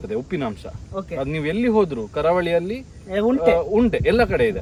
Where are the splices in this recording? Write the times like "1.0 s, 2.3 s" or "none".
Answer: none